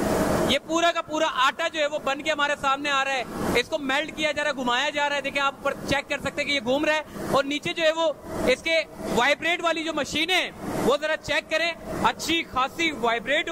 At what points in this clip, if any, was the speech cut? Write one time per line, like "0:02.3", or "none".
none

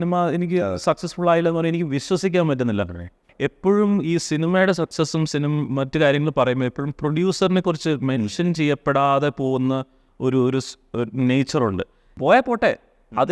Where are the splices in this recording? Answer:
0:03.3
0:12.0

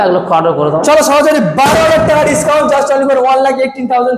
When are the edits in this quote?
none

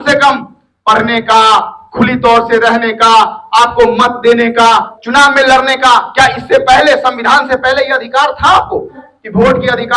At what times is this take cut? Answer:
0:05.0
0:09.0

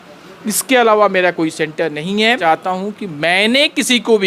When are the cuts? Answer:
0:02.4

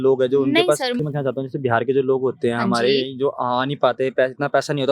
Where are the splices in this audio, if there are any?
0:01.0

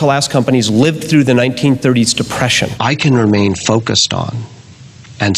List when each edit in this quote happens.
0:02.7

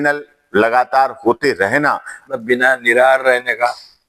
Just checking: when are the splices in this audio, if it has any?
0:02.4

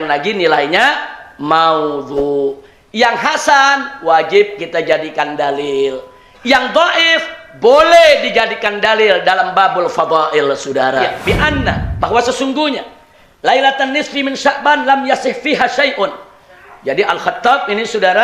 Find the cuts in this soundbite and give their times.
0:11.1

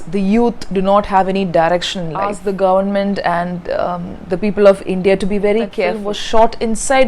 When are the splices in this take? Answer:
0:02.3
0:06.0

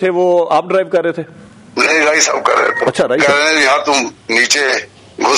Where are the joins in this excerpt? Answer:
0:03.2

